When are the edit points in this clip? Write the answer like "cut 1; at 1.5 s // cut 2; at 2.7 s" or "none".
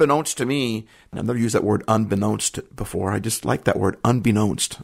cut 1; at 0.9 s